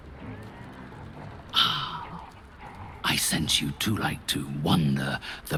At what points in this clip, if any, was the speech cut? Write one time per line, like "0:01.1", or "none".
none